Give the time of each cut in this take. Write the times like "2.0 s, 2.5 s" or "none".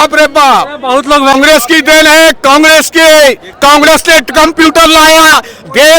1.3 s